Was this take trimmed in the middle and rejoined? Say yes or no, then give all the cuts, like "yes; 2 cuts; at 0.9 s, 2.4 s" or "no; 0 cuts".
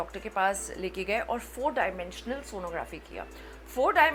no; 0 cuts